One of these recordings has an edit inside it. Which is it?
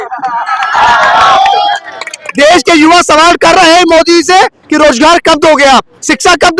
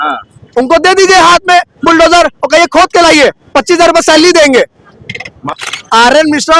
second; 1 cut; at 5.6 s

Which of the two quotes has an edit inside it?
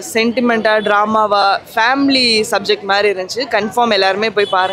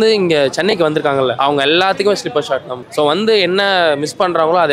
second; 2 cuts; at 1.3 s, 2.8 s

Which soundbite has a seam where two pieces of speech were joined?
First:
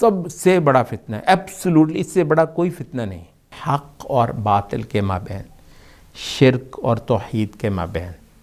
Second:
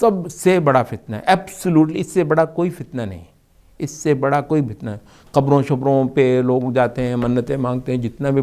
first; 1 cut; at 3.5 s

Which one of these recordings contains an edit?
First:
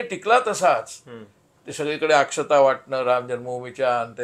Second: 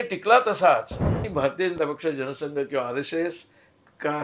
second; 1 cut; at 1.3 s

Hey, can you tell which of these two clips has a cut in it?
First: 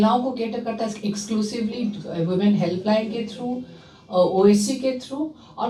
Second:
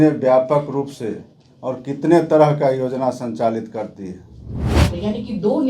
second; 1 cut; at 4.8 s

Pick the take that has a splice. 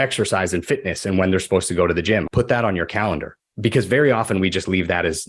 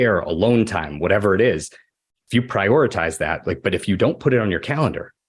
first; 2 cuts; at 2.3 s, 3.4 s

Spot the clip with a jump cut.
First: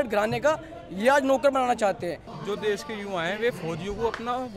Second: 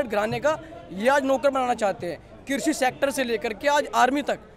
first; 1 cut; at 2.3 s

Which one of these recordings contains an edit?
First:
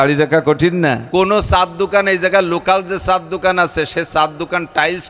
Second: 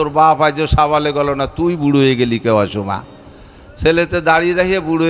first; 1 cut; at 1.0 s

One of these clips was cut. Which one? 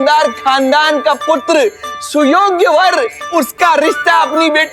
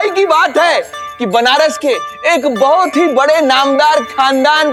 first; 1 cut; at 3.2 s

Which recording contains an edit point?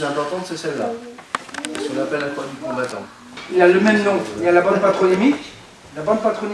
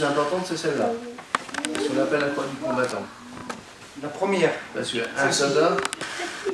first; 1 cut; at 3.4 s

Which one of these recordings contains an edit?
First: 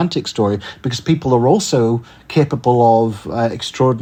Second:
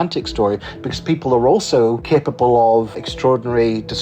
second; 2 cuts; at 2.0 s, 3.0 s

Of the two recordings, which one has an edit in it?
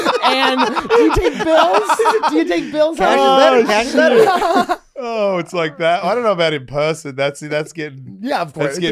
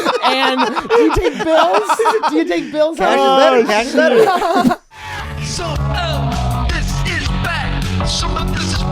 second; 1 cut; at 4.9 s

